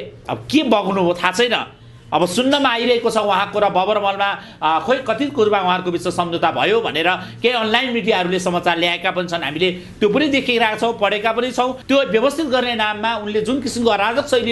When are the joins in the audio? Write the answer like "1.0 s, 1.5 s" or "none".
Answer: 11.8 s